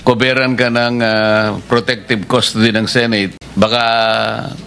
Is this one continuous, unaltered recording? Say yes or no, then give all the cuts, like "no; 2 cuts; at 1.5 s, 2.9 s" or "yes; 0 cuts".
yes; 0 cuts